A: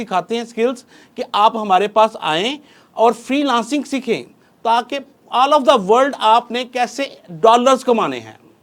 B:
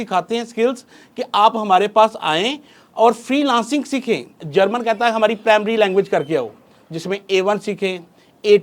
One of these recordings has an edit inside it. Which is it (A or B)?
B